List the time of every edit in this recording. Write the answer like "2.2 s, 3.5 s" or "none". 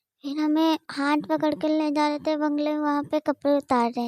none